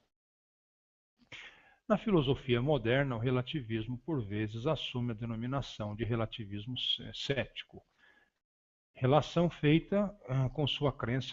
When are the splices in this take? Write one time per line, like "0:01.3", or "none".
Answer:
none